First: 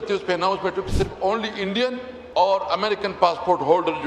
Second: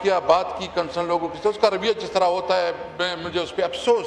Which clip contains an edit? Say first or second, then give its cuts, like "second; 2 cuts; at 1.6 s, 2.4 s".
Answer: first; 1 cut; at 2.1 s